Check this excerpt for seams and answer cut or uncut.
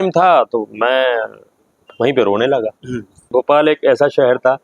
cut